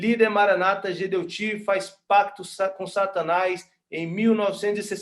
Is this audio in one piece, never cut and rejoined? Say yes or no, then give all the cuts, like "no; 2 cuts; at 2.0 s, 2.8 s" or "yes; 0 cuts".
yes; 0 cuts